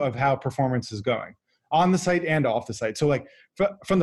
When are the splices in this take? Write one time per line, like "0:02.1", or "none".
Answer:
none